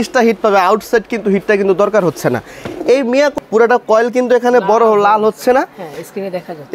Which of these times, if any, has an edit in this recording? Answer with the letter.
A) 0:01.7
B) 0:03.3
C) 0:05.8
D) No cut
B